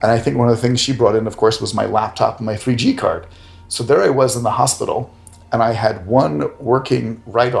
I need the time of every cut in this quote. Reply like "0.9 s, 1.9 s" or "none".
none